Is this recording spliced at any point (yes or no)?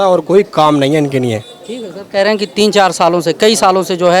no